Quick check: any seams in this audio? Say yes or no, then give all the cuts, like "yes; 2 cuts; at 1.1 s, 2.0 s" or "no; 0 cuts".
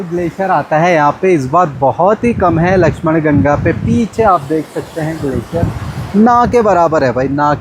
no; 0 cuts